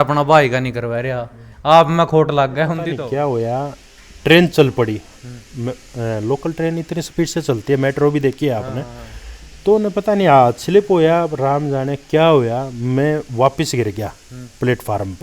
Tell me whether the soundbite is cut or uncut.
cut